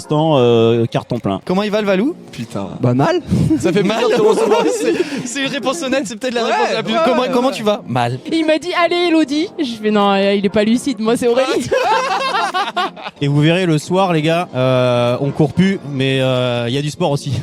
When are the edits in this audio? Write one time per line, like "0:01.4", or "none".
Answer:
0:01.4
0:08.2
0:13.2